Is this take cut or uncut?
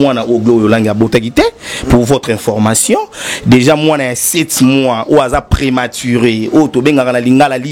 uncut